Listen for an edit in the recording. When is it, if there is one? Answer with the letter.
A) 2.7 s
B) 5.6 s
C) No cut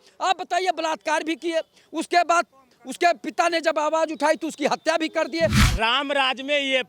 B